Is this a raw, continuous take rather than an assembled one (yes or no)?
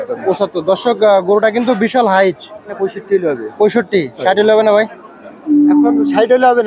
no